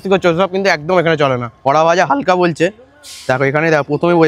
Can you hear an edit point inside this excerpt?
yes; 1 cut; at 1.5 s

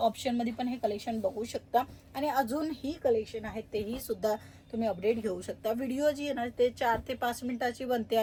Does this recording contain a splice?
no; 0 cuts

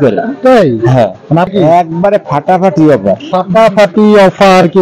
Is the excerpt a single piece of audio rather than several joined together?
no; 1 cut; at 1.5 s

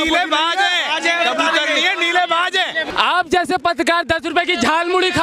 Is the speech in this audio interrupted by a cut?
yes; 1 cut; at 2.8 s

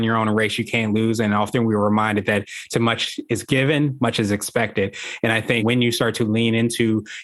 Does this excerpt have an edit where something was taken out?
yes; 1 cut; at 5.6 s

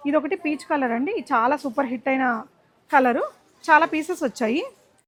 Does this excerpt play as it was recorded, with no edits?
yes; 0 cuts

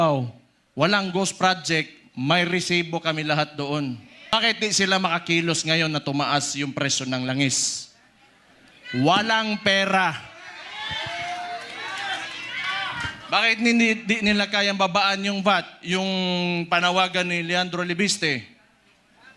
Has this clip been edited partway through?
yes; 1 cut; at 4.3 s

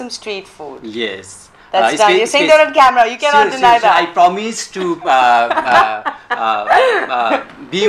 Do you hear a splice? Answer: no; 0 cuts

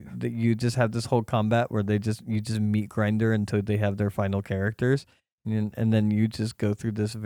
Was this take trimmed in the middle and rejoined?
no; 0 cuts

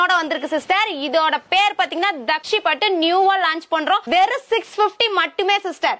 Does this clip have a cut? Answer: no; 0 cuts

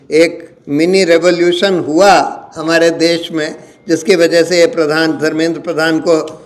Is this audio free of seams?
yes; 0 cuts

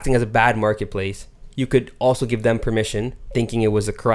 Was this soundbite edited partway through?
no; 0 cuts

